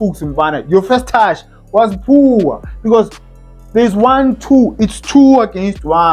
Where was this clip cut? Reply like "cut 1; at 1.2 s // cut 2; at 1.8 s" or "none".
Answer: none